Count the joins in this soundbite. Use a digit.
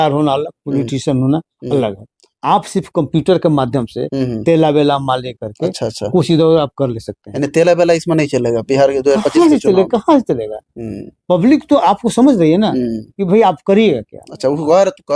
0